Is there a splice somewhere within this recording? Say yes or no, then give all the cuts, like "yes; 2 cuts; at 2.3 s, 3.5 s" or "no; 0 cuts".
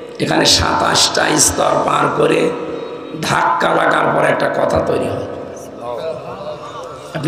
no; 0 cuts